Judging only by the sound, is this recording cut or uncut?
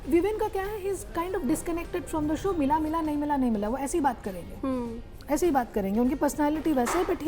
uncut